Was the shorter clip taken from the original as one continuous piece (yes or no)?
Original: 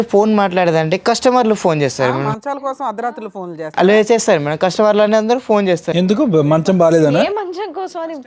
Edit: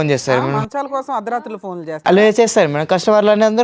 yes